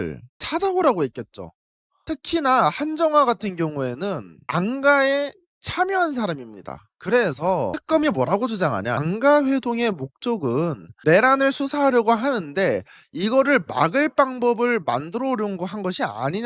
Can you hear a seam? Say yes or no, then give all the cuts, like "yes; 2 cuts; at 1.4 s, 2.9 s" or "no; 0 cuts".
yes; 1 cut; at 6.8 s